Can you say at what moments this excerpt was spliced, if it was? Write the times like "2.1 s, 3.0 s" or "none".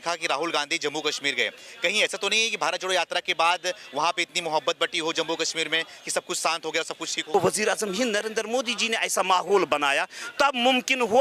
7.2 s